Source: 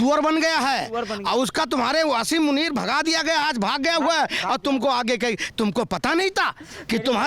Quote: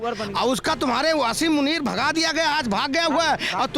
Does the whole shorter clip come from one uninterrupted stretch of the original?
yes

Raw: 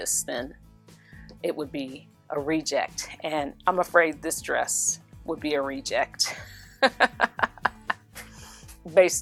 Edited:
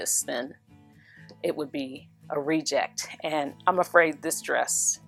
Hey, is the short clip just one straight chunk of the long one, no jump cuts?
yes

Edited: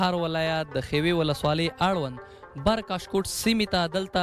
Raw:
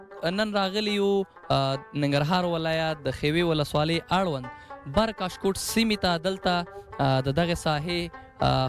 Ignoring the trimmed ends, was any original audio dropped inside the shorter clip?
no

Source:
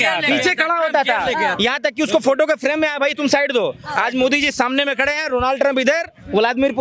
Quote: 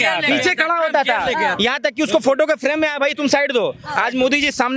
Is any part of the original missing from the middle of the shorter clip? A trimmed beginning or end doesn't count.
no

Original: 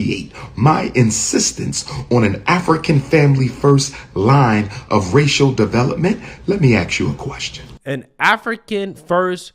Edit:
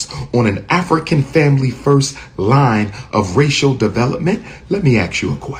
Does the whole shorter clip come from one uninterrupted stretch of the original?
yes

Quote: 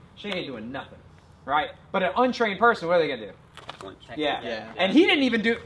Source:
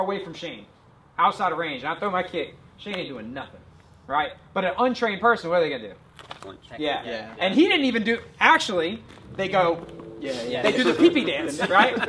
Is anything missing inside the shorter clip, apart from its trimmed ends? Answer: no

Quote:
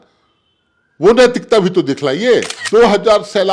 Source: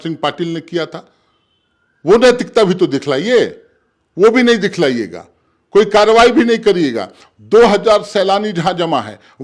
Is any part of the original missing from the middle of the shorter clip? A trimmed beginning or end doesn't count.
yes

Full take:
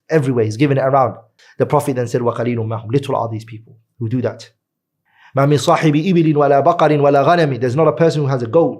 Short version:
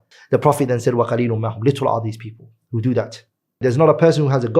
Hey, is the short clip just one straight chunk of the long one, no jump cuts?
no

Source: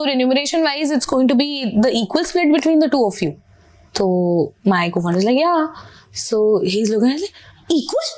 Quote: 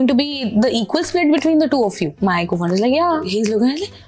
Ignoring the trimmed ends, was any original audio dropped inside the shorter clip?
yes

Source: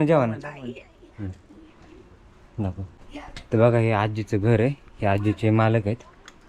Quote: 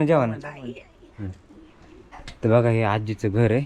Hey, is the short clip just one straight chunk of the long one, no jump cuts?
no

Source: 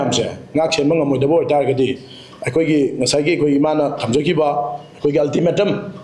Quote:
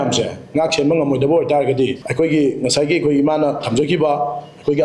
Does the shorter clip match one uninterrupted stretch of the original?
no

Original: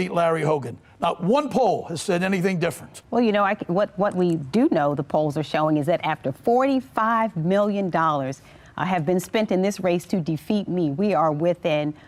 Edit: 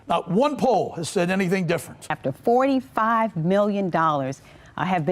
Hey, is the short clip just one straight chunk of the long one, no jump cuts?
no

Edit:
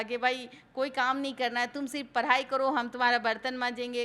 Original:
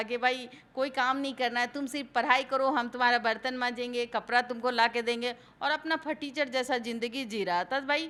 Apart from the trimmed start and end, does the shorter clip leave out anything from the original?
no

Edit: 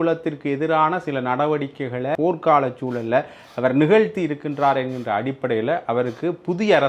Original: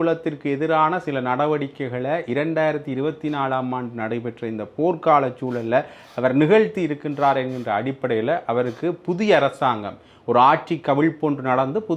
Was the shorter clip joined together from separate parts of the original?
yes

